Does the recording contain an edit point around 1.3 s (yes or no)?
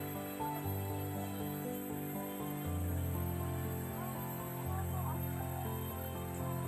no